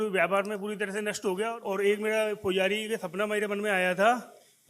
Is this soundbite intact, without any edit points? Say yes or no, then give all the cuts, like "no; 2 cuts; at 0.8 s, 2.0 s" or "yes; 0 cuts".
no; 1 cut; at 1.6 s